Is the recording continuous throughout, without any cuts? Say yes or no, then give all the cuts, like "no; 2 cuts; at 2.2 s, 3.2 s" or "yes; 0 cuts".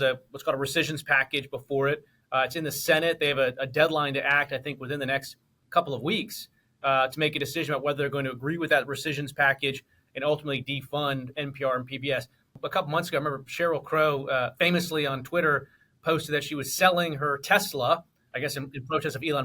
no; 1 cut; at 12.6 s